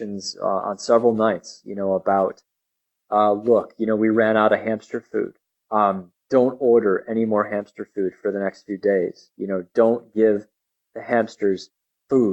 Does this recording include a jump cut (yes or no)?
no